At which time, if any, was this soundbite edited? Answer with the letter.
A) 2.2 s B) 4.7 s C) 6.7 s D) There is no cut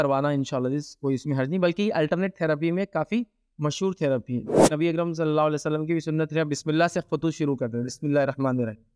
B